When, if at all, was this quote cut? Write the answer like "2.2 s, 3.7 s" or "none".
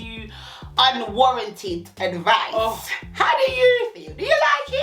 none